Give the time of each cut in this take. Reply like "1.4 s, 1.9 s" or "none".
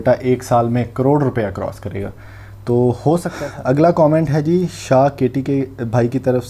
3.3 s